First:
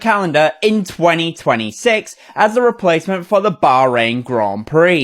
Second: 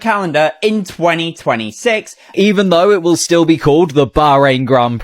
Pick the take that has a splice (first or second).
second